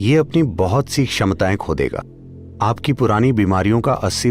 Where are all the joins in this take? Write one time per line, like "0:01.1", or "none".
0:02.2